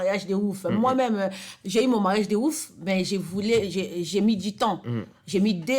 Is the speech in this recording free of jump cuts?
yes; 0 cuts

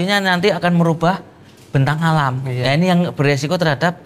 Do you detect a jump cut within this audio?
no; 0 cuts

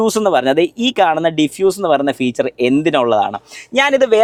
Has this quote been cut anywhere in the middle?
no; 0 cuts

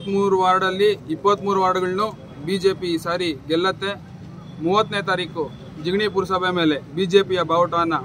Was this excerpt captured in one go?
yes; 0 cuts

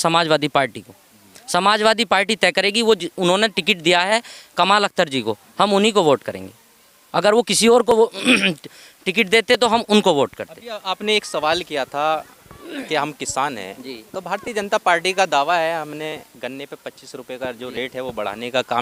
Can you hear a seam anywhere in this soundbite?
no; 0 cuts

